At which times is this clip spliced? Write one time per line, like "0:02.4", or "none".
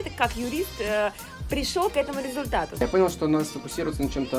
0:02.8